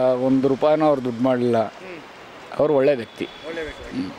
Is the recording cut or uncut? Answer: uncut